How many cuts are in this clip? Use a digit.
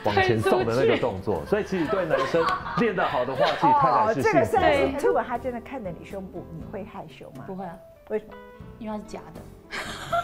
1